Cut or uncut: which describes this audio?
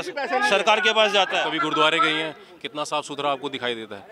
cut